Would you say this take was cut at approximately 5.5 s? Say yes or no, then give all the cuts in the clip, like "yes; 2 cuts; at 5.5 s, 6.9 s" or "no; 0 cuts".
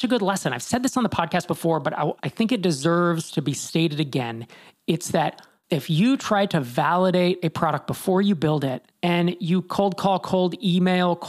yes; 1 cut; at 5.5 s